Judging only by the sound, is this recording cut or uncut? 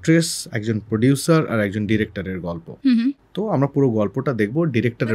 uncut